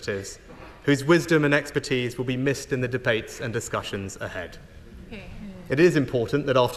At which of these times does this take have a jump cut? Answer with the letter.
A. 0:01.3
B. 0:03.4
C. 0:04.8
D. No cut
D